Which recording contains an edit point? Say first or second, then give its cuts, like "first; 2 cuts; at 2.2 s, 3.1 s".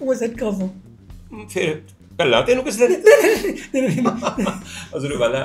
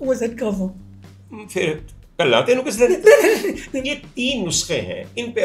second; 1 cut; at 3.7 s